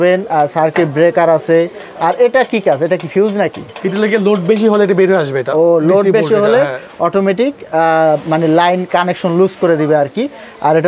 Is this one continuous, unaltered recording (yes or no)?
yes